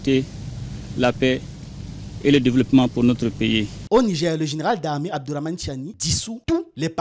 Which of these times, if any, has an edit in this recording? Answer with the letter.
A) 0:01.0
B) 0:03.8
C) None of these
B